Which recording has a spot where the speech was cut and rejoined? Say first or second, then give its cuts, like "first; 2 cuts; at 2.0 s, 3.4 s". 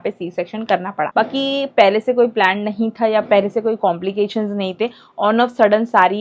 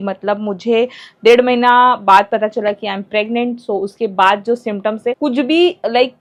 first; 1 cut; at 1.1 s